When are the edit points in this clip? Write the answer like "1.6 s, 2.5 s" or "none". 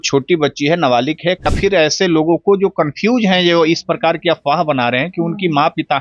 1.5 s